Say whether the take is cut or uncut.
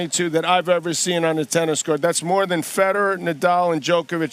uncut